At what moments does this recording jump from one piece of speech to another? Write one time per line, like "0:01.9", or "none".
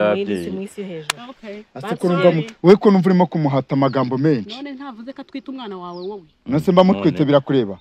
none